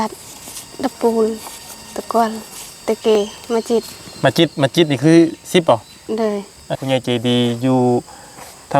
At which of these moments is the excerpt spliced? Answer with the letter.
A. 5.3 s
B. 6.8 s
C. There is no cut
B